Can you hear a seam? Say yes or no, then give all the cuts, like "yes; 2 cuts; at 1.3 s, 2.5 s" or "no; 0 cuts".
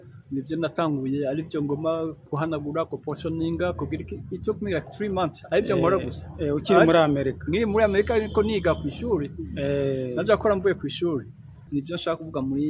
yes; 1 cut; at 11.5 s